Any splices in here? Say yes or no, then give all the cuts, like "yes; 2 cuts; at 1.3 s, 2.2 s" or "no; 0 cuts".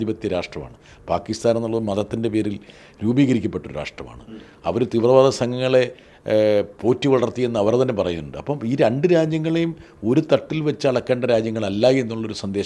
no; 0 cuts